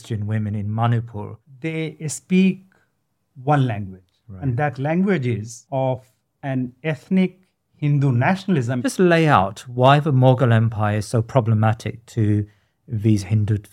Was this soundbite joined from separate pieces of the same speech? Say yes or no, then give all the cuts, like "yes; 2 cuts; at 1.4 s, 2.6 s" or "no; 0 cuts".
yes; 3 cuts; at 1.4 s, 5.5 s, 8.8 s